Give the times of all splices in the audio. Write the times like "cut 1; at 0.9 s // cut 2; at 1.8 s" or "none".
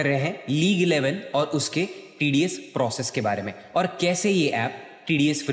none